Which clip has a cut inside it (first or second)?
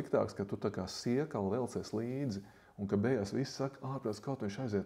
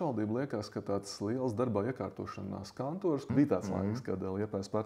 second